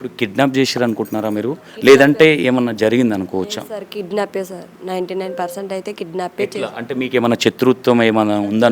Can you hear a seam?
no; 0 cuts

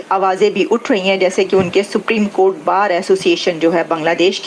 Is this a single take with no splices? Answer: yes; 0 cuts

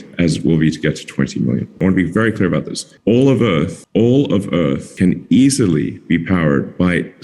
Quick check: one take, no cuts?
yes; 0 cuts

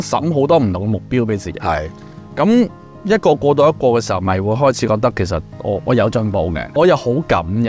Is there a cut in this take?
no; 0 cuts

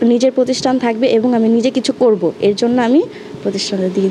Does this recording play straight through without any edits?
yes; 0 cuts

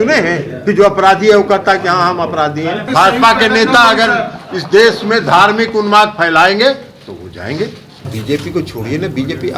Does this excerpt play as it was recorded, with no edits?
no; 2 cuts; at 2.9 s, 8.0 s

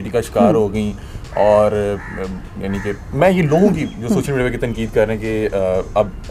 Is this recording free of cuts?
yes; 0 cuts

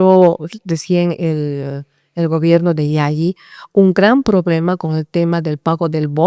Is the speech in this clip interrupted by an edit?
no; 0 cuts

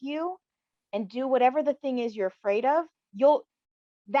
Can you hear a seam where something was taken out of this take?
no; 0 cuts

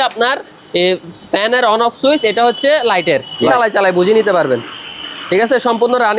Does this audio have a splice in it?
yes; 1 cut; at 3.5 s

